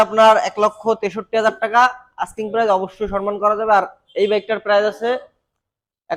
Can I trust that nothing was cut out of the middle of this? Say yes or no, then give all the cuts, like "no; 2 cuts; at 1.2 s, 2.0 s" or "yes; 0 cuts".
yes; 0 cuts